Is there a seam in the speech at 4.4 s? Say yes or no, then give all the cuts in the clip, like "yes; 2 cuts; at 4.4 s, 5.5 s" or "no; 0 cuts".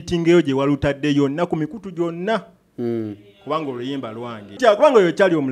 yes; 1 cut; at 4.4 s